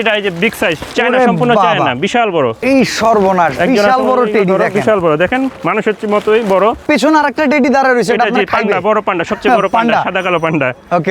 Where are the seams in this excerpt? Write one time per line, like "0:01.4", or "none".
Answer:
0:02.6
0:06.8

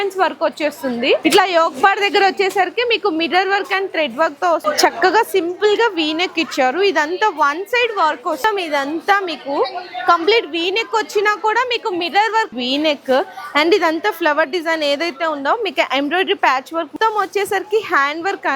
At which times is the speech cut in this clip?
0:01.2
0:04.6
0:08.4
0:12.5
0:16.9

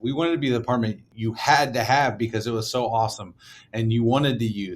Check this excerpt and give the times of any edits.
0:01.1

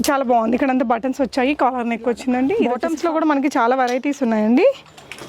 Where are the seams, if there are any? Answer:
0:02.6

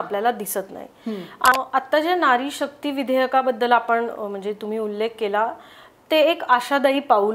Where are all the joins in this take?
0:01.5

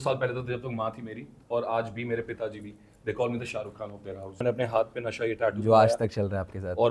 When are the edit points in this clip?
0:04.4

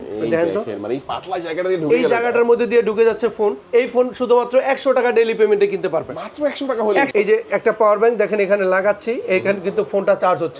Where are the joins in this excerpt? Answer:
0:07.1

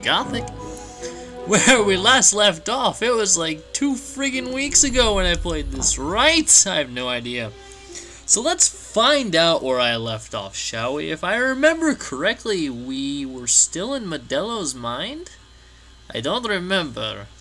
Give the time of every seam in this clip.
none

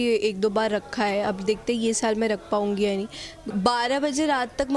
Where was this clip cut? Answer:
0:03.4

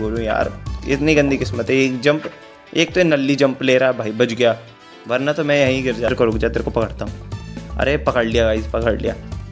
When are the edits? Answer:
0:06.1

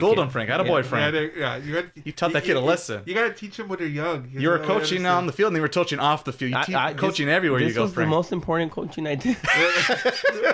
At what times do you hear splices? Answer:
none

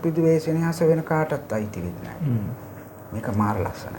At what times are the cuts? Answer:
none

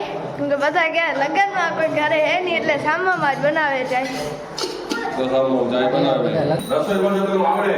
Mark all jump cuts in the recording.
0:06.6

